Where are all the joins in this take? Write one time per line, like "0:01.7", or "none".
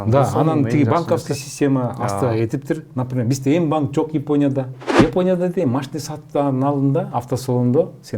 0:04.8